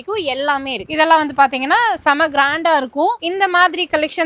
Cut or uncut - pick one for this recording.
uncut